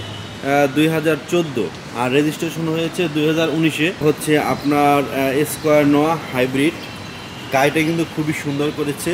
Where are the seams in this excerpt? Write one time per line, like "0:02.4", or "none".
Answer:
0:04.0